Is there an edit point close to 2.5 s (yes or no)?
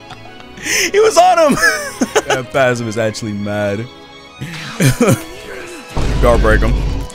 yes